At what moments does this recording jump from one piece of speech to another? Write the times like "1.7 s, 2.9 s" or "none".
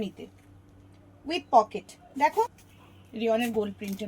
2.6 s